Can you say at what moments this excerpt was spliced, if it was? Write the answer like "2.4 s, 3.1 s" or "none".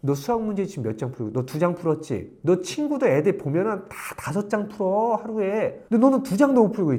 none

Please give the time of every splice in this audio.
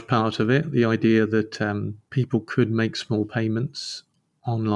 2.0 s

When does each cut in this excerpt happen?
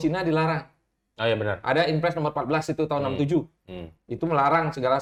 none

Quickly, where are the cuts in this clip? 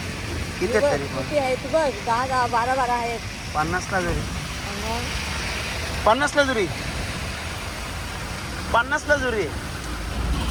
none

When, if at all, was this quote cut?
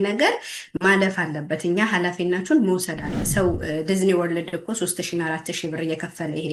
3.2 s

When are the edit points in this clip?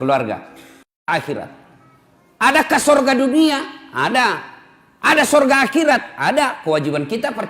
1.1 s

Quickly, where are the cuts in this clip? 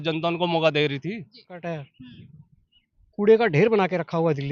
1.6 s

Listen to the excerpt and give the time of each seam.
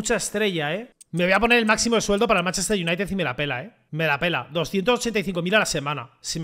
1.0 s

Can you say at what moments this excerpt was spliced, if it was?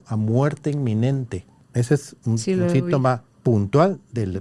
1.6 s, 3.3 s

